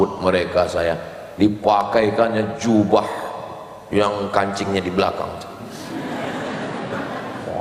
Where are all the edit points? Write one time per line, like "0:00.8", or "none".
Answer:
none